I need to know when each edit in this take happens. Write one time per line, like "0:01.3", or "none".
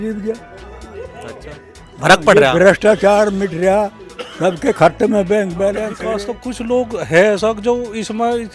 0:06.0